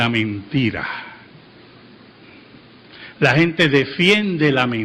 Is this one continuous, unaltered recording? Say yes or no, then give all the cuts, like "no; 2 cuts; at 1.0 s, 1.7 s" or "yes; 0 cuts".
no; 1 cut; at 3.3 s